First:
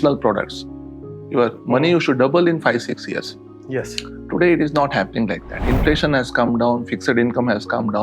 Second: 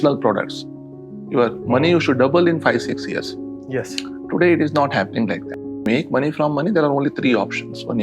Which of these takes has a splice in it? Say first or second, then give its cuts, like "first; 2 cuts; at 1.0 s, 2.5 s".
second; 1 cut; at 5.9 s